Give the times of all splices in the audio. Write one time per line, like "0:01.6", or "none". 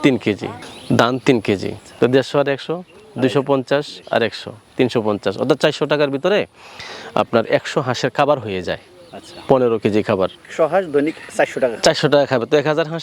0:01.8
0:10.5